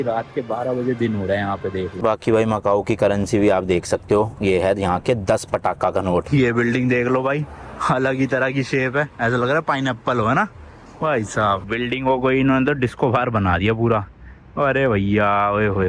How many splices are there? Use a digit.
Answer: 3